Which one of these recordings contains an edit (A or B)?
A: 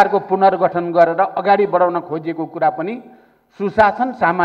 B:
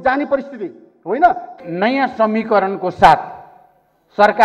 B